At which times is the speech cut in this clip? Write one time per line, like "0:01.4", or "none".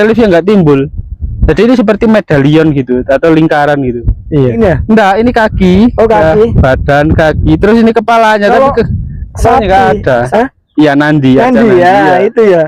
0:04.5
0:10.3